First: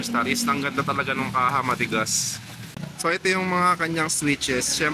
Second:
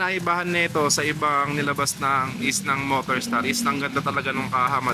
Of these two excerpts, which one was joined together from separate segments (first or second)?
first